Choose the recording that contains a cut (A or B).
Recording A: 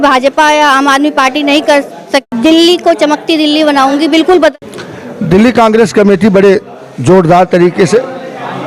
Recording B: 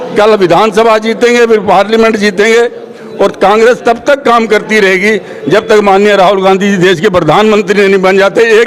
A